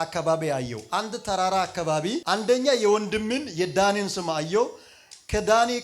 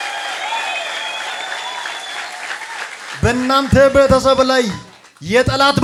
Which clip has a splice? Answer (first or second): first